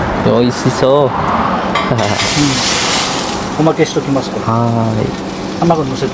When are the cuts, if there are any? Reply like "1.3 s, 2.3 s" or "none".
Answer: none